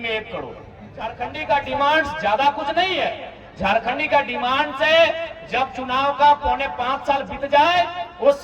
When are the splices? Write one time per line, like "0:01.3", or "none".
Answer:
0:01.1